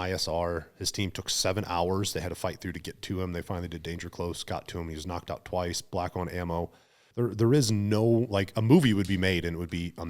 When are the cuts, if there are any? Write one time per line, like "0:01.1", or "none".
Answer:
0:07.0